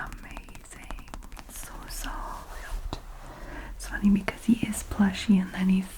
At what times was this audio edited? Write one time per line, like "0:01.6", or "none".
0:01.6